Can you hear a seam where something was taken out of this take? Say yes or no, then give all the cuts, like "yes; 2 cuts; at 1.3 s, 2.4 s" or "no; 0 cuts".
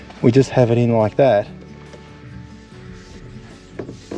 yes; 1 cut; at 1.5 s